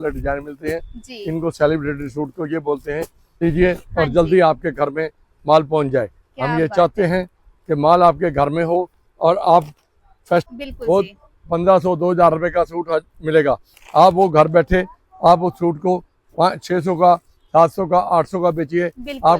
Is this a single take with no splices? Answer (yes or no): no